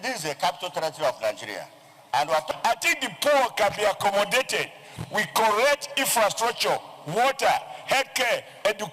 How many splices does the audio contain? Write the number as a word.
one